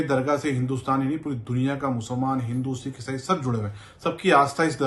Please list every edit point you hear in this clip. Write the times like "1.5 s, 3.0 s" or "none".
none